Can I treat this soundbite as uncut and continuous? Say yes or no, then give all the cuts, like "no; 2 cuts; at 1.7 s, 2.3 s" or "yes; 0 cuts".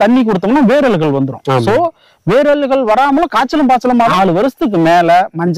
no; 1 cut; at 4.1 s